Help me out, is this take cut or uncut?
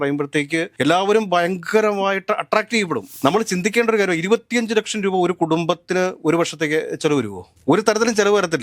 cut